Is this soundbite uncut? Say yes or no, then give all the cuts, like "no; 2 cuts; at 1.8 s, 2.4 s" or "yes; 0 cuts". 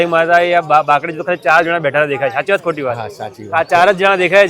yes; 0 cuts